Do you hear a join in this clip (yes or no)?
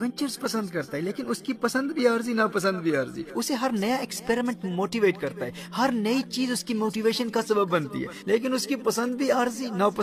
no